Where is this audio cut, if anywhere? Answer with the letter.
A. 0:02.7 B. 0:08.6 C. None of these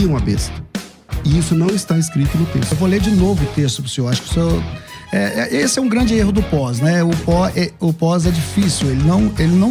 A